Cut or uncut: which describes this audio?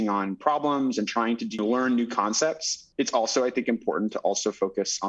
cut